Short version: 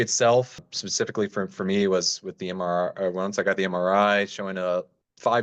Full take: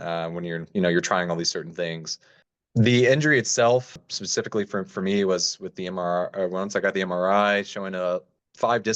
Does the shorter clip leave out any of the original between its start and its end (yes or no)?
no